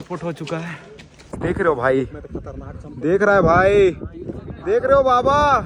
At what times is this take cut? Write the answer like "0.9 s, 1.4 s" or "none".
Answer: 1.4 s